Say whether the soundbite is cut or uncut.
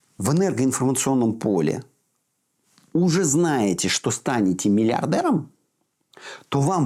uncut